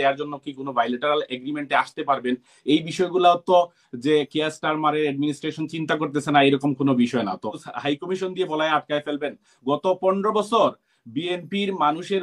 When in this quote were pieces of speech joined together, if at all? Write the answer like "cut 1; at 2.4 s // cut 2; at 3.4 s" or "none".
cut 1; at 7.6 s